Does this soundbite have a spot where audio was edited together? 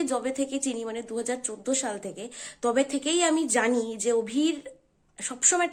no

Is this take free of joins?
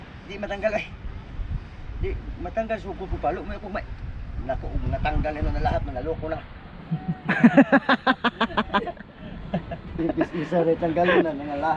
yes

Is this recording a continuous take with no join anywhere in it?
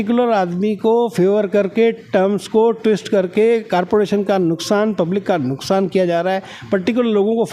yes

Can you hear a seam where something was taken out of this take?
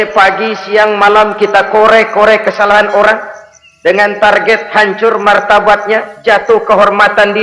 no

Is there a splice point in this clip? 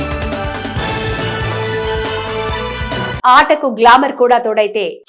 no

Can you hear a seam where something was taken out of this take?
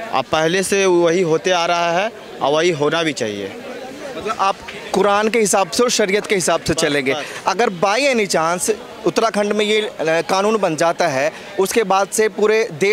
no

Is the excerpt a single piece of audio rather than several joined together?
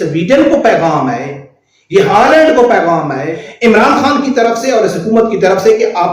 no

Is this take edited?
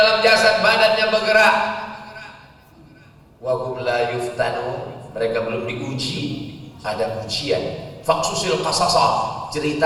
no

